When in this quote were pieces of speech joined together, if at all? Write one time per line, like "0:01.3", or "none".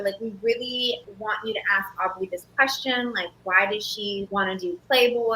0:01.1
0:04.3